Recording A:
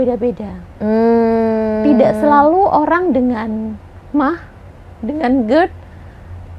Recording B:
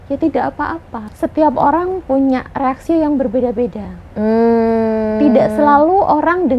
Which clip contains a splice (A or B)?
B